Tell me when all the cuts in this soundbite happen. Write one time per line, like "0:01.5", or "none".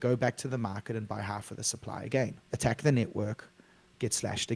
0:02.4

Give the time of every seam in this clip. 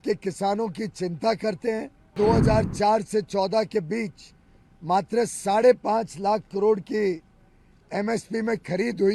0:02.1

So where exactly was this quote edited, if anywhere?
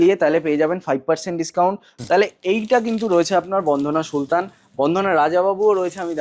0:01.9

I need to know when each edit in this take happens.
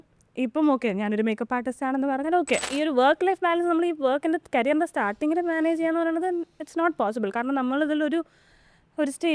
0:02.7

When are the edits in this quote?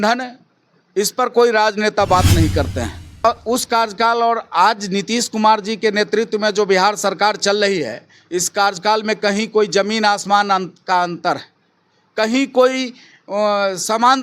0:03.2

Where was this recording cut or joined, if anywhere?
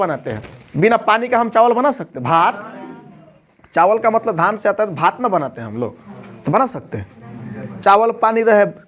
none

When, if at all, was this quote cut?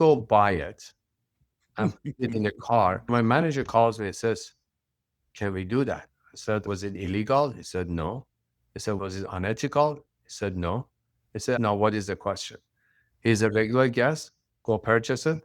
0:03.0
0:06.7
0:11.6

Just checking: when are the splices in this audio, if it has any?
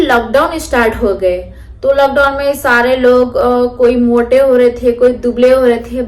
none

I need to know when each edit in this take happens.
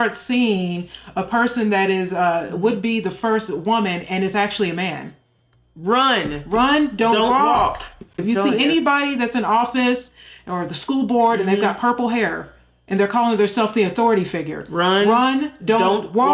none

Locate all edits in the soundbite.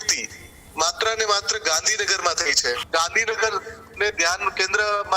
0:02.8

